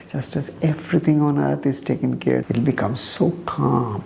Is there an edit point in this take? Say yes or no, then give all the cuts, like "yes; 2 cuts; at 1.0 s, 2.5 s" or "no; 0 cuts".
yes; 1 cut; at 2.5 s